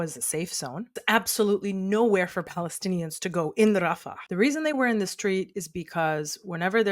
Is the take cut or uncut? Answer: cut